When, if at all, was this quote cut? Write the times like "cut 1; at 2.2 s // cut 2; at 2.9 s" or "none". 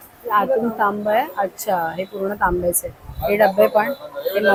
none